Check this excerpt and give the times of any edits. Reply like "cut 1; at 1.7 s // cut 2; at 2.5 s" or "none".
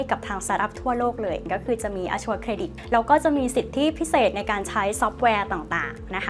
cut 1; at 1.4 s // cut 2; at 2.8 s